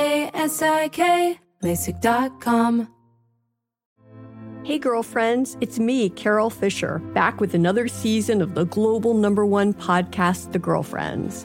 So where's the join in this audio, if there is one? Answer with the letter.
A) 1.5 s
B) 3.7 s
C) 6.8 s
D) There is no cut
B